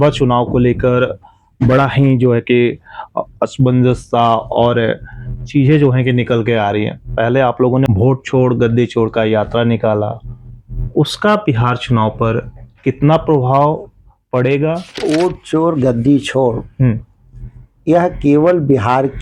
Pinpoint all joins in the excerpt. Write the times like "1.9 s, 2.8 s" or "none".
7.9 s, 15.0 s